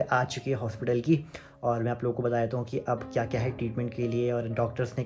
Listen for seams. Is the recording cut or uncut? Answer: uncut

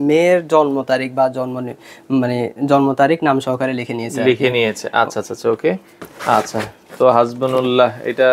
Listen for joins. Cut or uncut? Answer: uncut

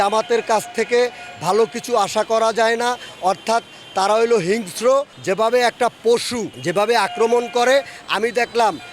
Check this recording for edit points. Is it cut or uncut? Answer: cut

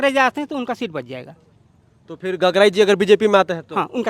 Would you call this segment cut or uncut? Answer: uncut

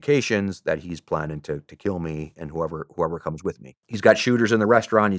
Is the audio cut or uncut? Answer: cut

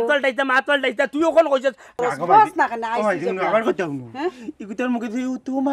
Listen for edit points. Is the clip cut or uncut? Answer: cut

